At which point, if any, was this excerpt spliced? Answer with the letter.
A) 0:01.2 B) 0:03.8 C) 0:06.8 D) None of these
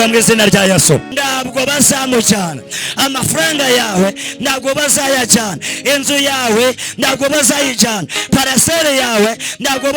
A